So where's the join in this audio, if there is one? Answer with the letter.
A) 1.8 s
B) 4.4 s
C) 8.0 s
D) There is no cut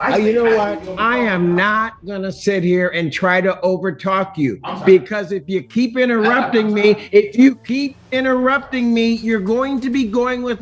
D